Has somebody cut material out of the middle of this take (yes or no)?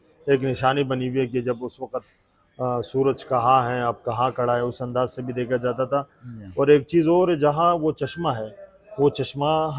no